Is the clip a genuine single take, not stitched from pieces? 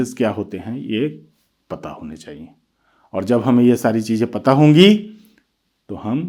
yes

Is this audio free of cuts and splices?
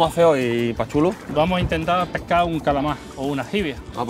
no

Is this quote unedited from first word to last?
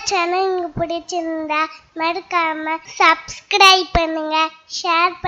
no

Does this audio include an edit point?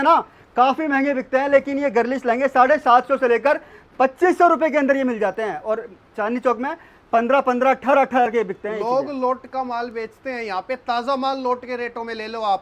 no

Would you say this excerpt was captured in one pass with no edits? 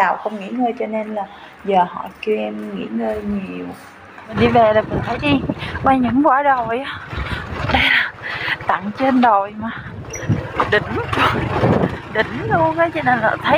no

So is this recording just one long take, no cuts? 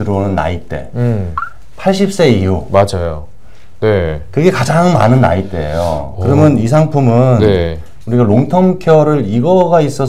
yes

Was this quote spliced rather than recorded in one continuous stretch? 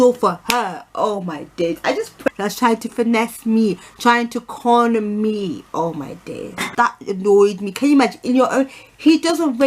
yes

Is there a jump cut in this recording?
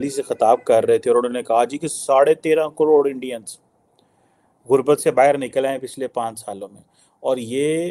no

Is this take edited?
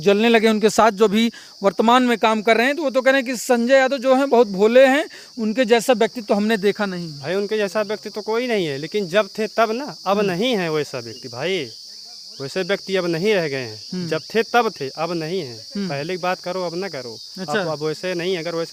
no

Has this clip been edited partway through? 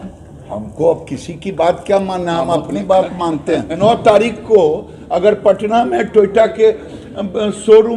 yes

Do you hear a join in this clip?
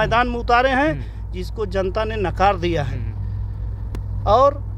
no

